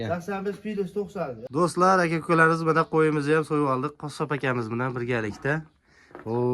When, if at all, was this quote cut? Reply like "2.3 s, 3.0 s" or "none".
1.4 s